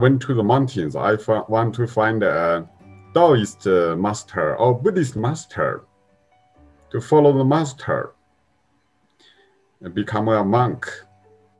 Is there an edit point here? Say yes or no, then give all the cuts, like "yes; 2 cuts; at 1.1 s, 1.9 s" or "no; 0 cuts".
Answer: no; 0 cuts